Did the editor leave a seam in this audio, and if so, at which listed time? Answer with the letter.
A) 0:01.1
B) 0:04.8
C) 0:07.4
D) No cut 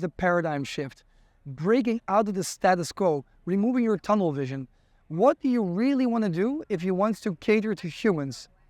D